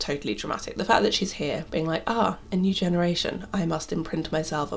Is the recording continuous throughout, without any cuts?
yes; 0 cuts

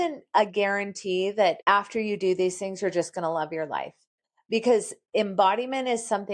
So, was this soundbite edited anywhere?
yes; 1 cut; at 1.6 s

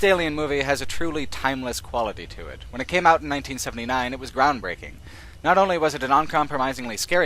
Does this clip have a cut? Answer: yes; 1 cut; at 3.8 s

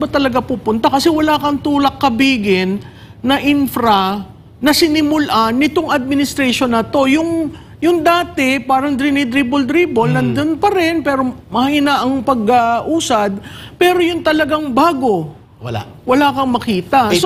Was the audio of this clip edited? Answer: no; 0 cuts

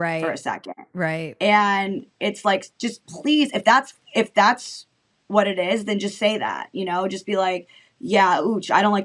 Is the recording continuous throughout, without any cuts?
yes; 0 cuts

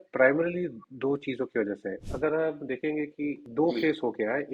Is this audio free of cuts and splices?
no; 2 cuts; at 1.9 s, 3.4 s

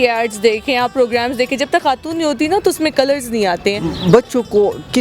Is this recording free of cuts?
no; 1 cut; at 3.8 s

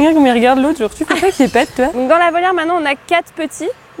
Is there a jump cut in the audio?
yes; 1 cut; at 2.0 s

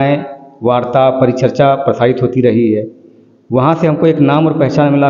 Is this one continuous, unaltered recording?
yes; 0 cuts

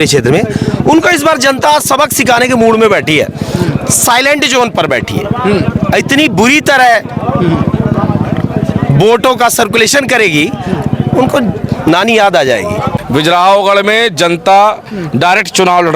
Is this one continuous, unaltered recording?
no; 1 cut; at 12.9 s

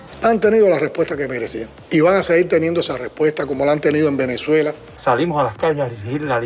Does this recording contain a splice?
no; 0 cuts

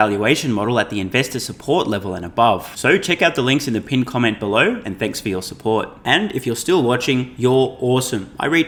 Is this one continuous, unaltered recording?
yes; 0 cuts

